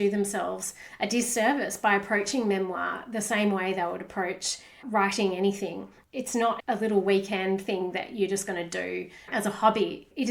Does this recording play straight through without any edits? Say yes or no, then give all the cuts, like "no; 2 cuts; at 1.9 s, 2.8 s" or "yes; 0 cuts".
no; 1 cut; at 6.1 s